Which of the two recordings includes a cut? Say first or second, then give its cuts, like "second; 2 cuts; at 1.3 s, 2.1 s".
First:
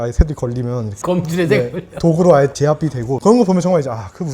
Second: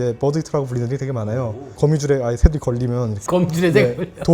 first; 1 cut; at 3.2 s